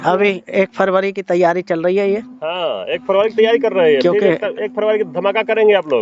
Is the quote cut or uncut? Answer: uncut